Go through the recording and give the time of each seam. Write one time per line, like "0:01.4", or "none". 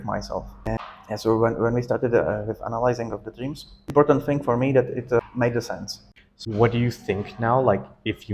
0:00.8
0:03.9
0:05.7